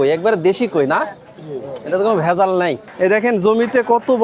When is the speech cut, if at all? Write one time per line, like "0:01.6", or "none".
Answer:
0:02.8